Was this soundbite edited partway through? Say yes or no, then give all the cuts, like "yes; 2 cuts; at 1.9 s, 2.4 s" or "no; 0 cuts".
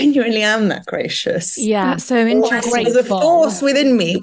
no; 0 cuts